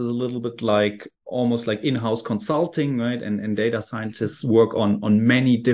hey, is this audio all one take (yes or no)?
no